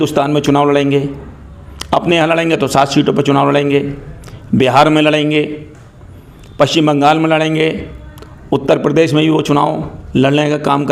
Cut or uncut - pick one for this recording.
uncut